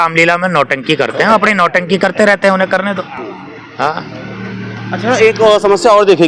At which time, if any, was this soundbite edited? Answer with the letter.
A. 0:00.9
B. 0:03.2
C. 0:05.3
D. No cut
D